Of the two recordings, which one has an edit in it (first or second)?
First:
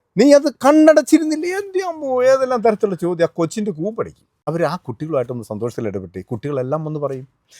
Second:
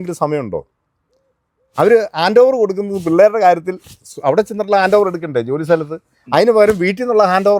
first